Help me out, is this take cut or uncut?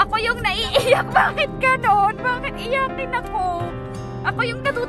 uncut